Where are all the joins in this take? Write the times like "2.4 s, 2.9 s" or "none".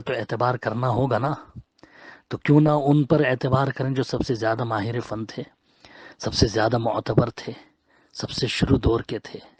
none